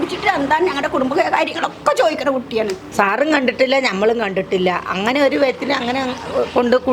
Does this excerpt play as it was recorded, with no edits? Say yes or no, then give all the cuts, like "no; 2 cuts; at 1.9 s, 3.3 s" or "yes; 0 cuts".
no; 1 cut; at 2.8 s